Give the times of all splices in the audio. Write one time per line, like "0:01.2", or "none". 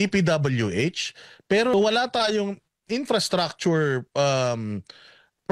0:01.7